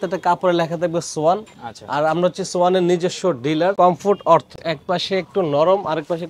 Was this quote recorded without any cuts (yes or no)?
no